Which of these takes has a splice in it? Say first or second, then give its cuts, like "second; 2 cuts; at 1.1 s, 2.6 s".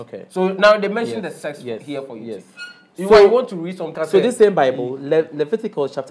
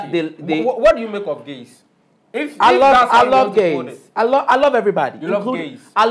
first; 1 cut; at 3.9 s